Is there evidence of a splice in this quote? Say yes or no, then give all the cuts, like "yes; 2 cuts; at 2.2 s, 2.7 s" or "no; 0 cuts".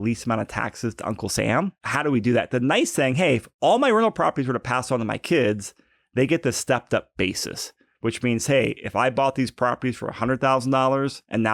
yes; 1 cut; at 1.8 s